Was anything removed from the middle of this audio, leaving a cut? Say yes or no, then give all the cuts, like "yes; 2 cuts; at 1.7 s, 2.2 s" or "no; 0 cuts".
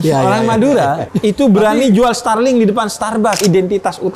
yes; 2 cuts; at 1.1 s, 3.4 s